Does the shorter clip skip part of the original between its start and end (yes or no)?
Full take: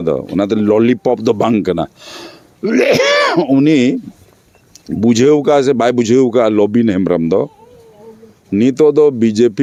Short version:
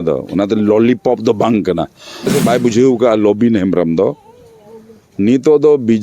yes